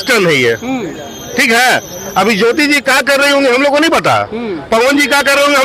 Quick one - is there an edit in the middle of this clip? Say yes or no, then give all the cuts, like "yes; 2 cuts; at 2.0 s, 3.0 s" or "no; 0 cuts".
no; 0 cuts